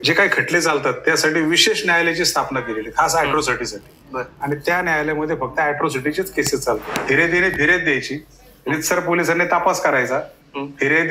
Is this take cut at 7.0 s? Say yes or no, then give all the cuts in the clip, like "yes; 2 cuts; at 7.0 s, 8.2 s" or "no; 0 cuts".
yes; 1 cut; at 7.0 s